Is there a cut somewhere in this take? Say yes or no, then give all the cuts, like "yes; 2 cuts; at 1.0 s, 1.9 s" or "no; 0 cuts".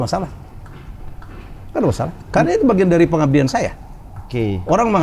no; 0 cuts